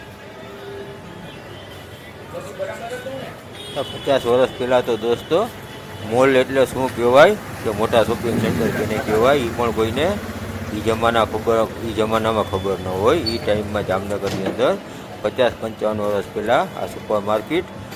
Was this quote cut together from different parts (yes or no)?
no